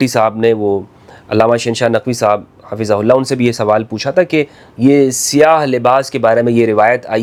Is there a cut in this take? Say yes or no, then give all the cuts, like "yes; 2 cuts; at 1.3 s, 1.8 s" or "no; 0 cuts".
no; 0 cuts